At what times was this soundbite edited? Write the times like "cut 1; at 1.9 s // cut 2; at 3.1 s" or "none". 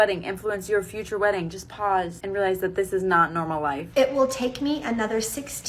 cut 1; at 2.2 s // cut 2; at 3.8 s